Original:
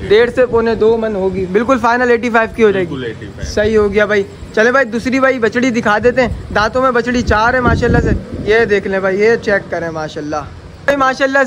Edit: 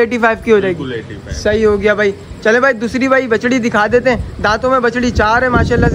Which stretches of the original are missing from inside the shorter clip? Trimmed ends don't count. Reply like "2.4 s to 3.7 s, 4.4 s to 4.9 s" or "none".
none